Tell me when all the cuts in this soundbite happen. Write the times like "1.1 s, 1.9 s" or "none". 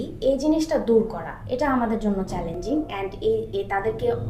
none